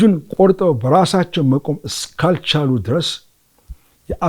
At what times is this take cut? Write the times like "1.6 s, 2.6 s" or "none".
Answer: none